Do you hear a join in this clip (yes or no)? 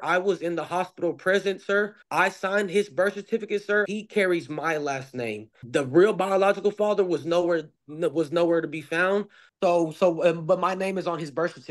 yes